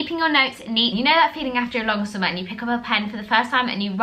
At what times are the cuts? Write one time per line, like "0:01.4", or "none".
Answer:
0:00.9